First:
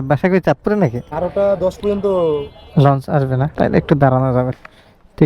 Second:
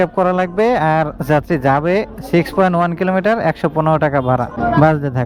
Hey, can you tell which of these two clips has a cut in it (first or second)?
first